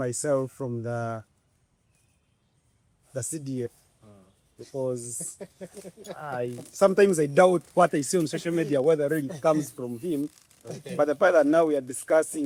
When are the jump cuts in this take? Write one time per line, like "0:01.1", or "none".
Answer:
none